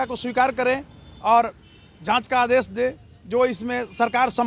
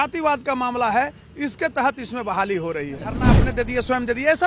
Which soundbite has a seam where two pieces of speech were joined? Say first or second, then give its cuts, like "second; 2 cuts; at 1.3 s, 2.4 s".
second; 1 cut; at 3.2 s